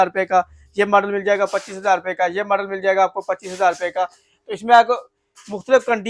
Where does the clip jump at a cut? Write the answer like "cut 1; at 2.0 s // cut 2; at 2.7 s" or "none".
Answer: none